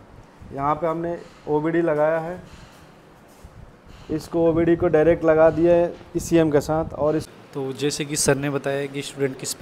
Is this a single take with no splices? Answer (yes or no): no